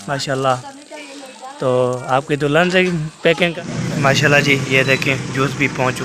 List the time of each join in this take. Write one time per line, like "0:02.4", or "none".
0:03.5